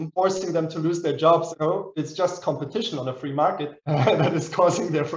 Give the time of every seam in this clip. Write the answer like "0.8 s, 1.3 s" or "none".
1.5 s